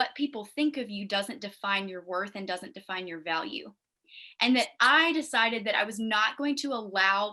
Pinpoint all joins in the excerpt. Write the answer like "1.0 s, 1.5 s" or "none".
none